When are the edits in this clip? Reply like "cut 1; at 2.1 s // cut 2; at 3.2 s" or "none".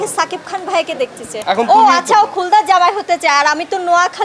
cut 1; at 1.3 s